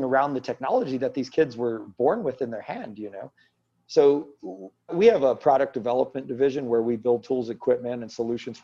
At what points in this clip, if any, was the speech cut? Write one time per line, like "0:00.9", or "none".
0:04.9